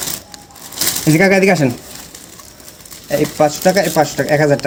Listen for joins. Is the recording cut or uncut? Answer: uncut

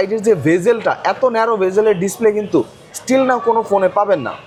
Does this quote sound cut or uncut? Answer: uncut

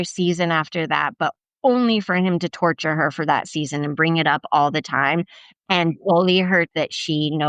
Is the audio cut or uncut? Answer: uncut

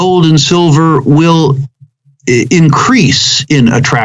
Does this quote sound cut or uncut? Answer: uncut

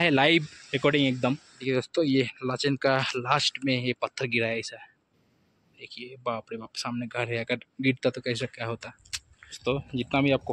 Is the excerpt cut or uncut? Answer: cut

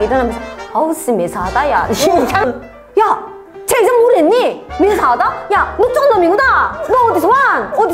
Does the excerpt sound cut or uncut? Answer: cut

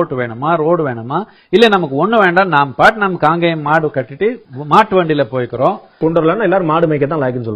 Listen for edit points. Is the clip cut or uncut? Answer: cut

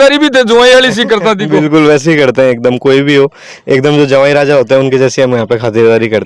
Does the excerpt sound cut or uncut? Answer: uncut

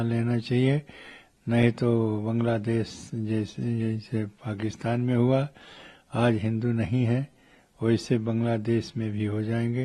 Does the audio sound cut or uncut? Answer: uncut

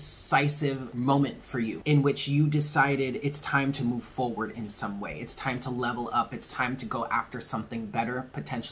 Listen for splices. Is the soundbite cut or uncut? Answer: cut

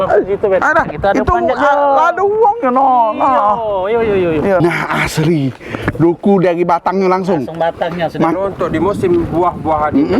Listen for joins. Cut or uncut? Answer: cut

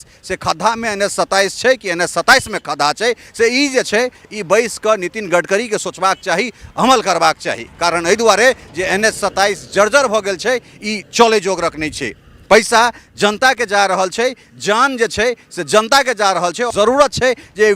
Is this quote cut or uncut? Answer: cut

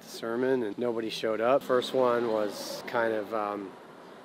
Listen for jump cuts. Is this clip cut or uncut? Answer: cut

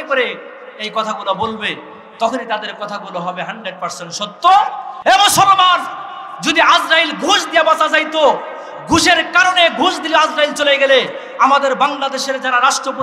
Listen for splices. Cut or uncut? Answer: cut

